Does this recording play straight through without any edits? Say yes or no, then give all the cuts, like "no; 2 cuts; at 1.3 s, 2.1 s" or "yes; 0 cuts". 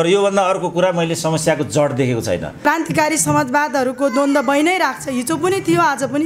no; 1 cut; at 2.5 s